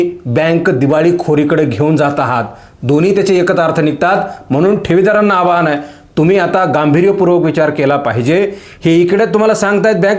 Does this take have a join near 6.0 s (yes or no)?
no